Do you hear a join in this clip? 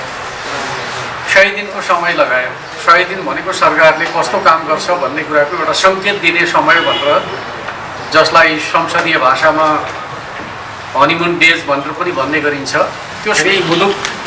yes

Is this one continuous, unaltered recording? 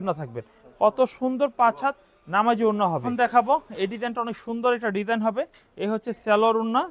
no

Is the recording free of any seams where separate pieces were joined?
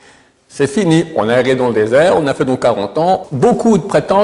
no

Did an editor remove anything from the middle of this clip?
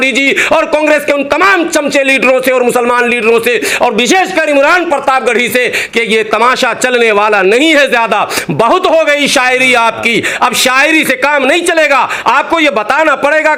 no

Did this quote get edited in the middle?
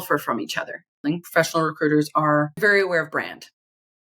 yes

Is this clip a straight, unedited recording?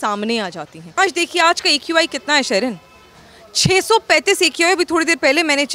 no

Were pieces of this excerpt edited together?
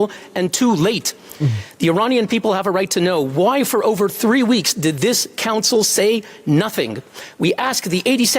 yes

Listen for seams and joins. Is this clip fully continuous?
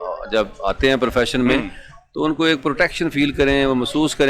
yes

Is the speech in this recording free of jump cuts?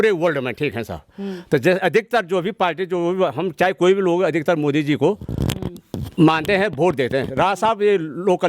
yes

